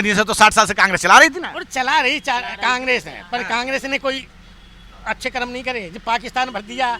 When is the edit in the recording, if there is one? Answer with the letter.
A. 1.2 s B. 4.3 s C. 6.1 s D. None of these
D